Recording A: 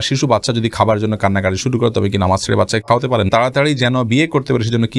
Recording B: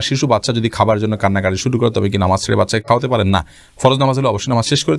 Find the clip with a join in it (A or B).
A